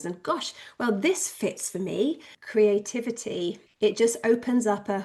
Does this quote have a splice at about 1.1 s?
no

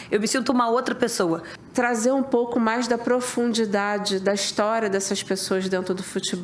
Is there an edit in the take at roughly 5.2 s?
no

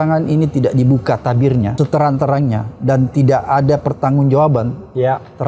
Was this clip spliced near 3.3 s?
no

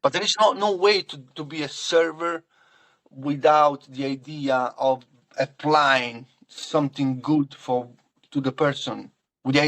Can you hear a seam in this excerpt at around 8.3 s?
no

